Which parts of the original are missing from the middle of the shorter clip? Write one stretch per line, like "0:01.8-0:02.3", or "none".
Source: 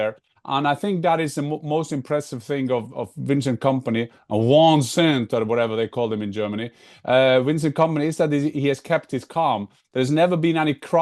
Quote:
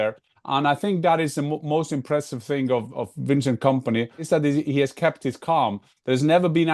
0:04.2-0:08.1